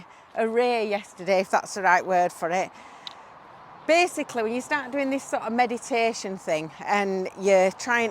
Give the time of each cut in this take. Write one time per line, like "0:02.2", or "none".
none